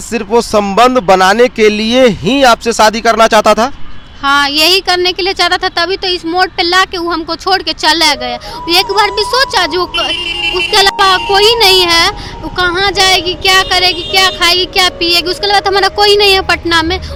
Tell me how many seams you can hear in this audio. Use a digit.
0